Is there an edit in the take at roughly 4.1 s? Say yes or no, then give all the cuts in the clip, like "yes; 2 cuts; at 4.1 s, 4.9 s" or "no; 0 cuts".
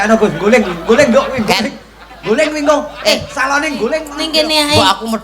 yes; 1 cut; at 4.1 s